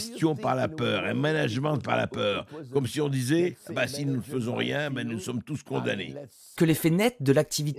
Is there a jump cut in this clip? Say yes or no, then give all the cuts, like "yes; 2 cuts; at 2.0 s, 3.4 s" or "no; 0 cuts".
yes; 1 cut; at 6.5 s